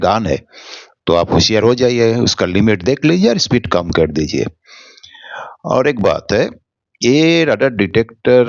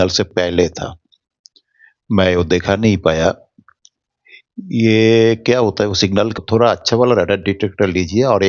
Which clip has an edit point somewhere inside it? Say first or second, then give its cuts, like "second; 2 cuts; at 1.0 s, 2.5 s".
second; 1 cut; at 6.3 s